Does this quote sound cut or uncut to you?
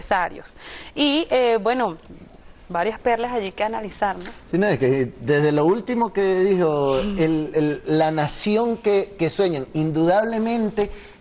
cut